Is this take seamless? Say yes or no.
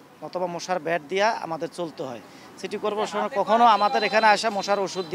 yes